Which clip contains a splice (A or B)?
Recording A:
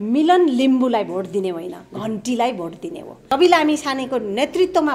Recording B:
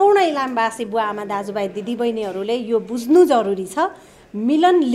A